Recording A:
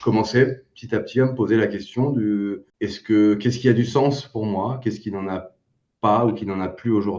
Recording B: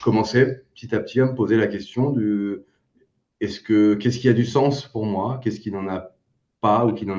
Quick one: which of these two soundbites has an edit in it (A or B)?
A